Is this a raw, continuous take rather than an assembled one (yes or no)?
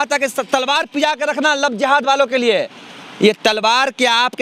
yes